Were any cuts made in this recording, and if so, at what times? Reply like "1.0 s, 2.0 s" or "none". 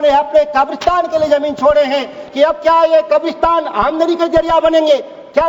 2.2 s